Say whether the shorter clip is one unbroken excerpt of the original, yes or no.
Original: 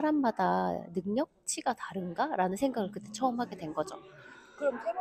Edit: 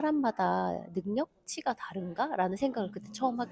yes